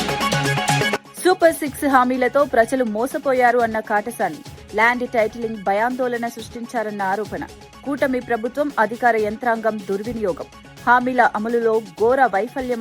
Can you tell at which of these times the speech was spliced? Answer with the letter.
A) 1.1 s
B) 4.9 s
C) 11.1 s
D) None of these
A